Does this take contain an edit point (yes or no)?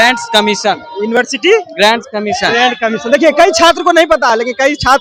no